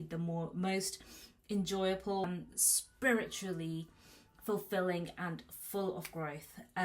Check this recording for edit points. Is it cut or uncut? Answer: cut